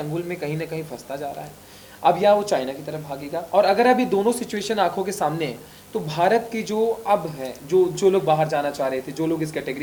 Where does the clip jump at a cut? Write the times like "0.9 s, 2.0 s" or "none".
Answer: none